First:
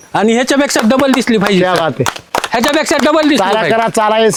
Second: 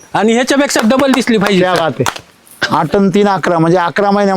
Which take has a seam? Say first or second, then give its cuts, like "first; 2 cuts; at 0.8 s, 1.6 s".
second; 1 cut; at 2.2 s